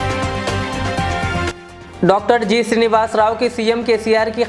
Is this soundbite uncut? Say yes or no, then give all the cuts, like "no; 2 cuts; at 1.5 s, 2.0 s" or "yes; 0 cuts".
no; 1 cut; at 1.6 s